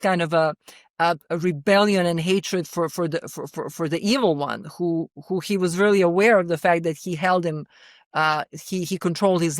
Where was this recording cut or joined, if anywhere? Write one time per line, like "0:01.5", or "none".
none

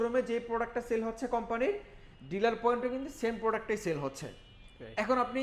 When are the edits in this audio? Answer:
none

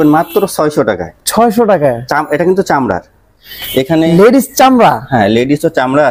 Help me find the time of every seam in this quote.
none

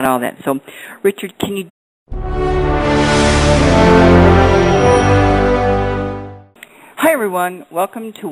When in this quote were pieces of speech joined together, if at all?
none

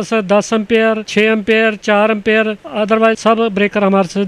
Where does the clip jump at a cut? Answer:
none

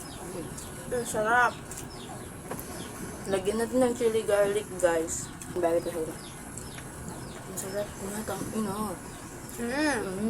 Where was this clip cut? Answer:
0:05.6

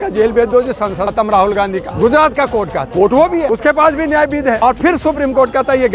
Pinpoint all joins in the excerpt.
0:01.1
0:01.9
0:02.9
0:03.5
0:04.6

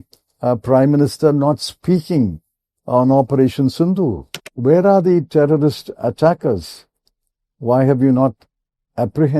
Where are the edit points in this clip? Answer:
0:04.3

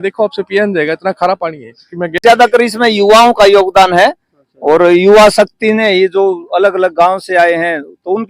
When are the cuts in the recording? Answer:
0:02.2

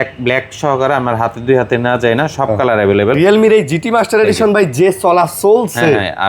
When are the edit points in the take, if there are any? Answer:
0:03.2

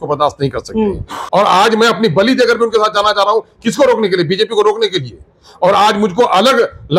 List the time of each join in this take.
0:01.1

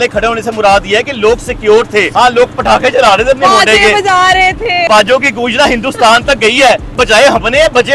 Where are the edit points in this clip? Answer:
0:02.1
0:04.9
0:07.0

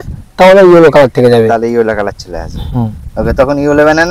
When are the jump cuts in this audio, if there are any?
none

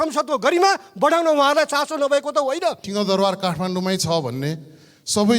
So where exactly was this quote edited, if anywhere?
0:02.8

